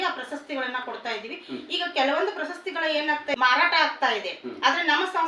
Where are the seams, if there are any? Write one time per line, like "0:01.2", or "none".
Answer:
0:03.3